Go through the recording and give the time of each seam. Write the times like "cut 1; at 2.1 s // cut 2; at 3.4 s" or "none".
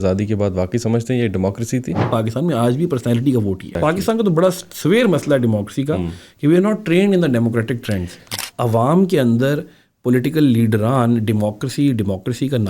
cut 1; at 2.0 s // cut 2; at 3.8 s // cut 3; at 8.3 s